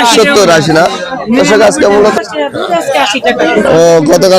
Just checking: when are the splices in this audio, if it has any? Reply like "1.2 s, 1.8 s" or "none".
2.1 s